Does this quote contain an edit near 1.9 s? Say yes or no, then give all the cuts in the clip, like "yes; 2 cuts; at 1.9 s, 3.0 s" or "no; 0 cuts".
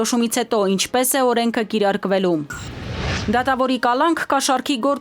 no; 1 cut; at 3.1 s